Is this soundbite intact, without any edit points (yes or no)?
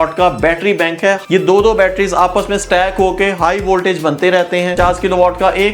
no